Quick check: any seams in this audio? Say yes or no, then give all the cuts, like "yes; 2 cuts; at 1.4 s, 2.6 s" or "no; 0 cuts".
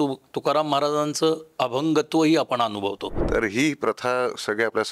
yes; 1 cut; at 3.1 s